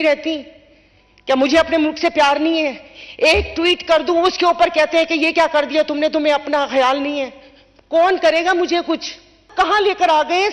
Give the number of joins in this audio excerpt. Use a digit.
1